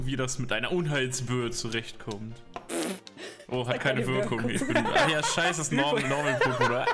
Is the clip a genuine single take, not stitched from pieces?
yes; 0 cuts

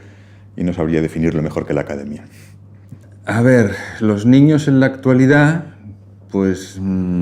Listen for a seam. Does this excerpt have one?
yes; 1 cut; at 2.2 s

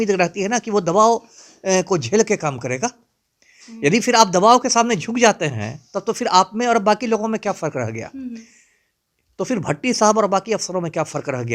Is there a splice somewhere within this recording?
no; 0 cuts

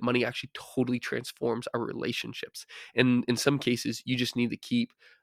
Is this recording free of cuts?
yes; 0 cuts

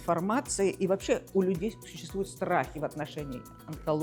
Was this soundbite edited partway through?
no; 0 cuts

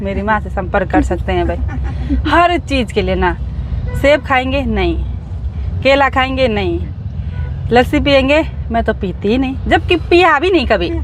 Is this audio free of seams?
yes; 0 cuts

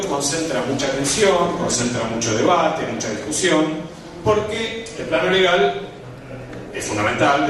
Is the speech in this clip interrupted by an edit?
no; 0 cuts

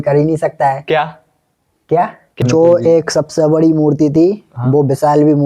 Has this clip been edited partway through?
yes; 1 cut; at 2.4 s

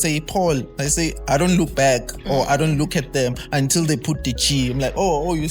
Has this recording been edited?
no; 0 cuts

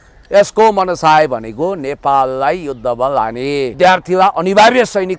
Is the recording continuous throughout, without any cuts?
no; 1 cut; at 3.7 s

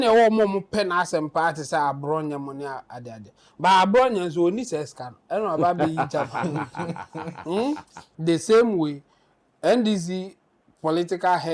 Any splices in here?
yes; 1 cut; at 8.1 s

